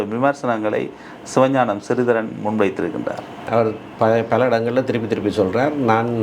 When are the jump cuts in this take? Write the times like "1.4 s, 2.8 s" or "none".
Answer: 3.4 s